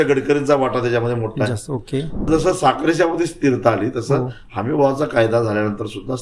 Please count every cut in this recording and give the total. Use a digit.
1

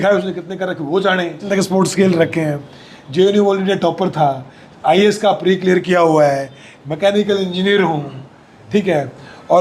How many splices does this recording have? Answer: 1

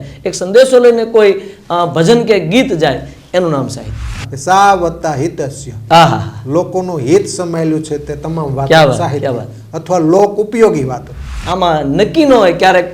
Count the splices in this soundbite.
2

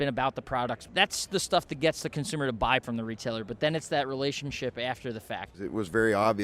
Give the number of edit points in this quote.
3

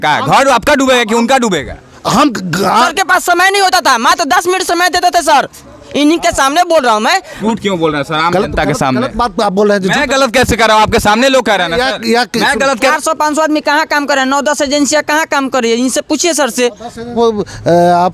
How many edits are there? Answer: 4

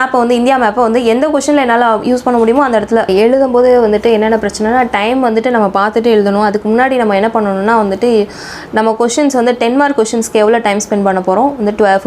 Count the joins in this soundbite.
1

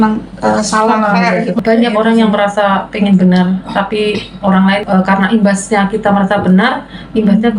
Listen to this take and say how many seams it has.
2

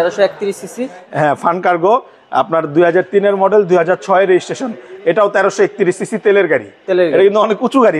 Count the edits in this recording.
1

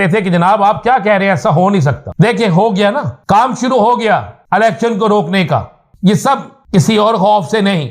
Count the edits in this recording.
5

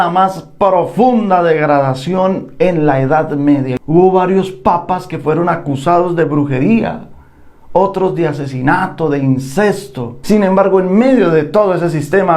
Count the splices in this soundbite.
2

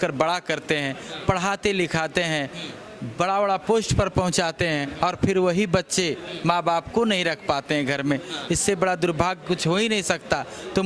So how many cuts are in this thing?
0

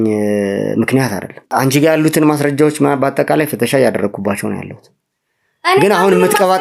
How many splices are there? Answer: 1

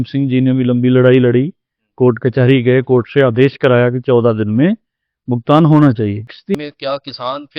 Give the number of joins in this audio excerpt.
1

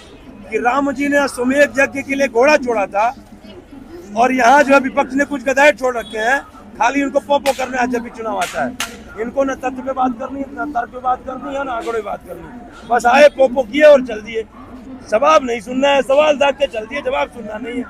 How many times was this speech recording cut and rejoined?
0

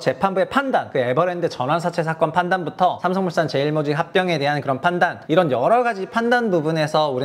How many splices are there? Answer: 3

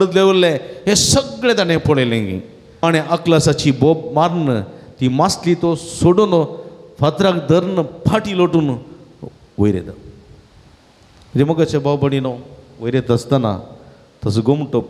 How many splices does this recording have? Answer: 1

